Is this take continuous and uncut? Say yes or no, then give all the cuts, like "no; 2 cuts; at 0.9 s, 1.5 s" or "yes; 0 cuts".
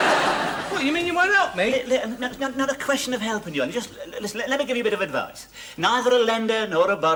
yes; 0 cuts